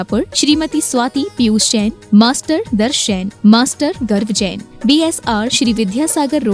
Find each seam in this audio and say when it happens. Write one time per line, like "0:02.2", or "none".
none